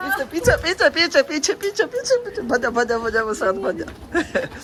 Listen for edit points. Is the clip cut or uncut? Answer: uncut